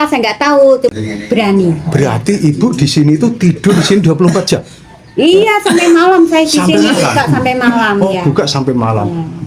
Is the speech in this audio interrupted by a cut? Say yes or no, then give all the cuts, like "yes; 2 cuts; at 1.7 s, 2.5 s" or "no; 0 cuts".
yes; 1 cut; at 0.9 s